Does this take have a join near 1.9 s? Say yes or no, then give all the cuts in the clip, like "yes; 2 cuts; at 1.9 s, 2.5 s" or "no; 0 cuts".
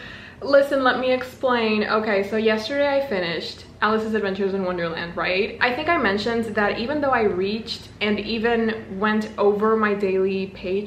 no; 0 cuts